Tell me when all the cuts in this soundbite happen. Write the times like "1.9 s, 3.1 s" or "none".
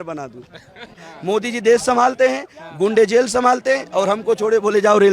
0.9 s